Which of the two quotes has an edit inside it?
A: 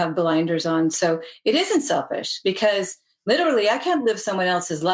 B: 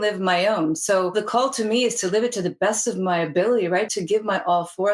B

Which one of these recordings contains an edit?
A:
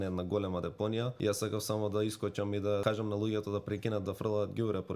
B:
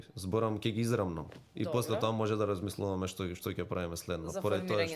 A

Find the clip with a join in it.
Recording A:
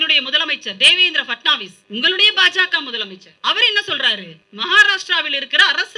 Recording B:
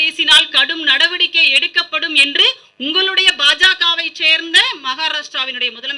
A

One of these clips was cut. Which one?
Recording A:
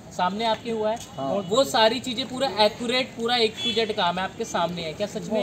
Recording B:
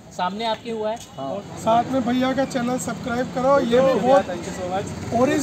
B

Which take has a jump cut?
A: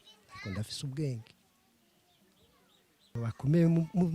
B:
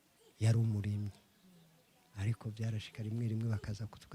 A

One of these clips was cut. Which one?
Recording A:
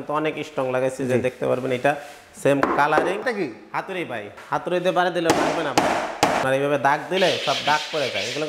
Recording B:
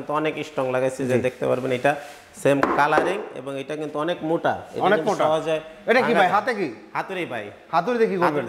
A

